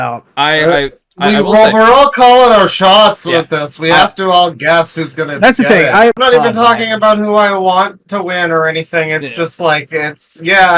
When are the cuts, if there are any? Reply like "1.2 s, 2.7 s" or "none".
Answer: 6.2 s

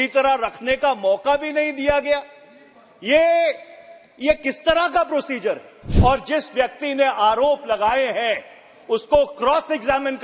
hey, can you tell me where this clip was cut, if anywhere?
5.8 s

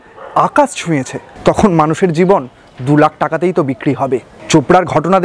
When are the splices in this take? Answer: 4.3 s

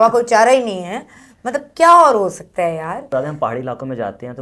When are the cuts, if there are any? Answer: 3.1 s

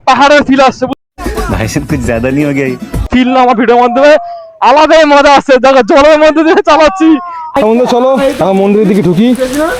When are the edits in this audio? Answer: 0.9 s, 3.1 s, 7.4 s

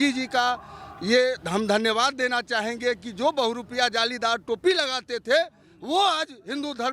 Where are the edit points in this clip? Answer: none

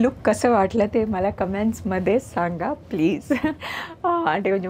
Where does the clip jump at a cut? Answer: none

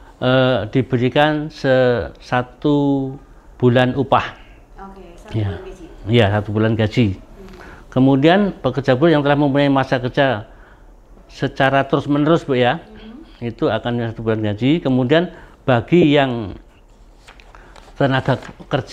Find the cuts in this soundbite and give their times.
none

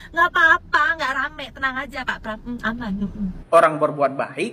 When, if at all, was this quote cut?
3.4 s

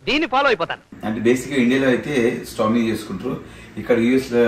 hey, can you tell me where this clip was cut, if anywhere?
0.9 s

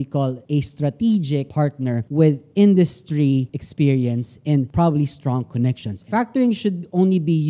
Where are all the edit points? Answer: 6.1 s

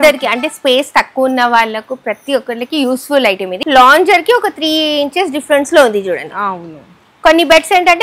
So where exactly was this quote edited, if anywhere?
3.6 s

